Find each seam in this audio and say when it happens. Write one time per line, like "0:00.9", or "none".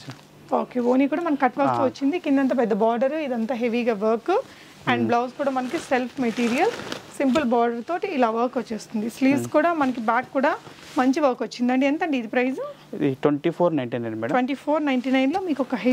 none